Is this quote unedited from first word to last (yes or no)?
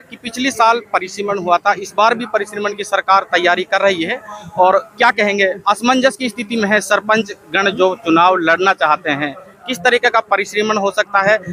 yes